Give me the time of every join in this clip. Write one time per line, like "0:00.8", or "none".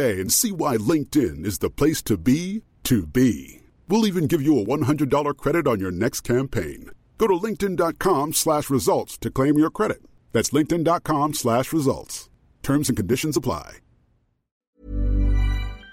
0:14.7